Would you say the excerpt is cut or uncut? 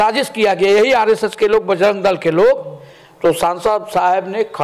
uncut